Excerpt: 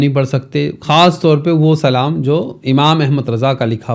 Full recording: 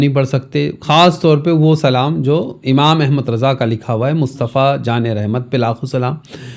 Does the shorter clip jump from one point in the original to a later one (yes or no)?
no